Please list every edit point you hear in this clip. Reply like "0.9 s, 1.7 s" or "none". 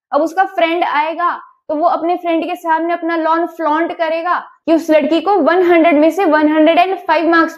4.5 s

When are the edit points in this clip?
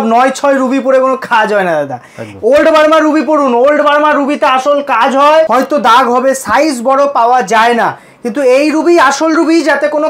5.5 s

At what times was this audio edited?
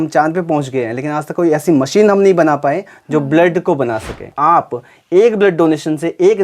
4.3 s

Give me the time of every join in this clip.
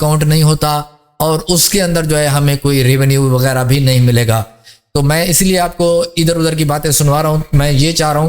4.6 s

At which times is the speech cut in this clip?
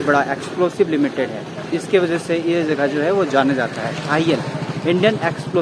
none

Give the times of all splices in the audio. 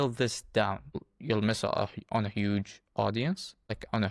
1.1 s

